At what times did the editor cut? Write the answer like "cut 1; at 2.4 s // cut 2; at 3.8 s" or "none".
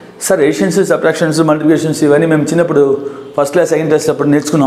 none